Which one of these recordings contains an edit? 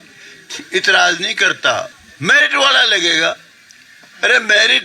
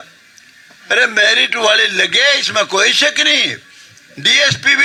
first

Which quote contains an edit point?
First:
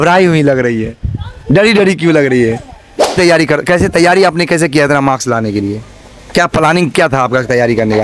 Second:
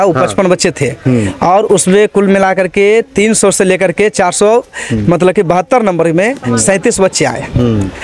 first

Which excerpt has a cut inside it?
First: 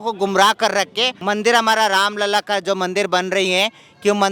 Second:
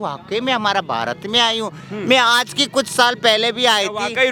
first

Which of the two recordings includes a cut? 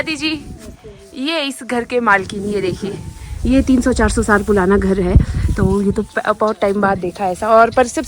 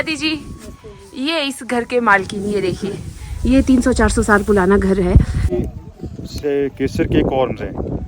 second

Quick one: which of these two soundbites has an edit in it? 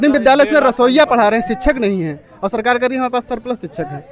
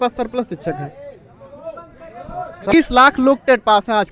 second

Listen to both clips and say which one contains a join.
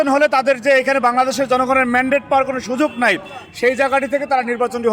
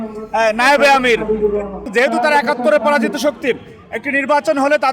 second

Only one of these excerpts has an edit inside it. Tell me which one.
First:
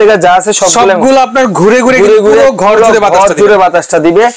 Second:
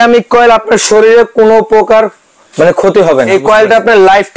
second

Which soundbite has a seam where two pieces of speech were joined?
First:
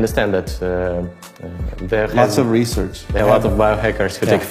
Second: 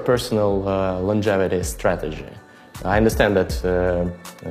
first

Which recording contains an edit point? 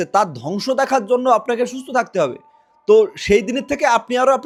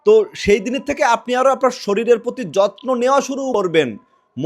second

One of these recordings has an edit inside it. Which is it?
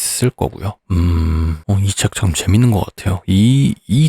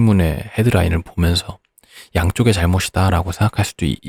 first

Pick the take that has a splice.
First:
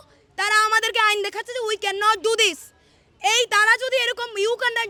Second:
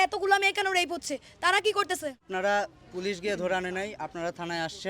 second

